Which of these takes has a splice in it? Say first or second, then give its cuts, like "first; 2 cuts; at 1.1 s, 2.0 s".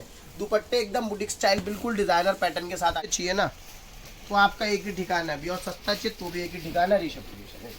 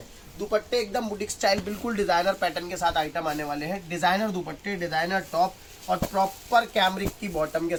first; 1 cut; at 3.1 s